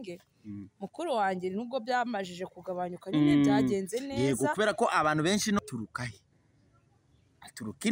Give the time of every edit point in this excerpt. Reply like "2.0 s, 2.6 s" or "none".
5.6 s

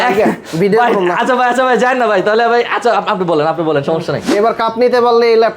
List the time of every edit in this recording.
4.3 s

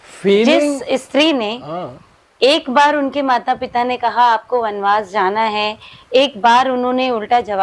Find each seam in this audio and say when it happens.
none

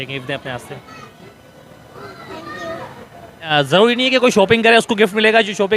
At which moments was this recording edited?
3.5 s

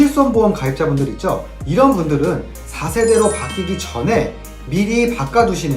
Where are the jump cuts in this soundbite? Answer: none

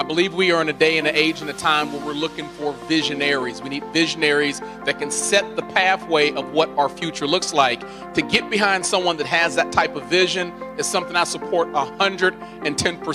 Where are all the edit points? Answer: none

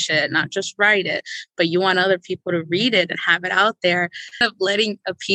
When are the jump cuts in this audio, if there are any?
4.4 s

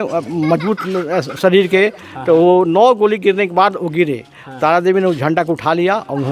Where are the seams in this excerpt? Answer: none

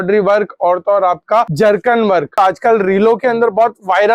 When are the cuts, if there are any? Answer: 1.5 s, 2.3 s

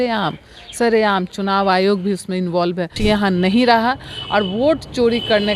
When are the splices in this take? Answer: 2.9 s

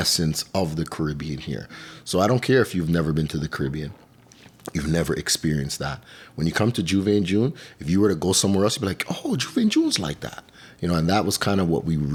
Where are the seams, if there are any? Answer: none

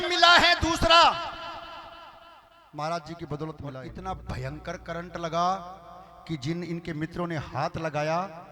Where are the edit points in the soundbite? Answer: 3.9 s

